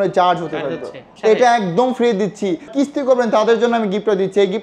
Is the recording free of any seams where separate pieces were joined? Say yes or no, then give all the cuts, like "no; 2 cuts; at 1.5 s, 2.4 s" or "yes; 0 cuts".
no; 2 cuts; at 1.0 s, 2.7 s